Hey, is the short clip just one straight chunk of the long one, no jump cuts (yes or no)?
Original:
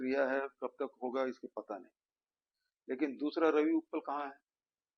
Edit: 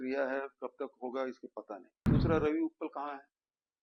no